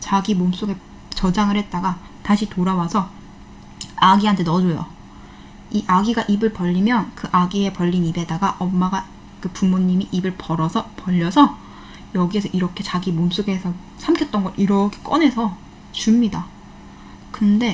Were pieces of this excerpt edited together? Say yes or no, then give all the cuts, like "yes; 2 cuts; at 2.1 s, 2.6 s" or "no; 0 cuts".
no; 0 cuts